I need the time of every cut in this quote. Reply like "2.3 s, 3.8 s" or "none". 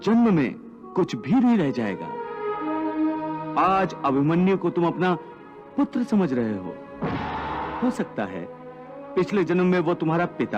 7.7 s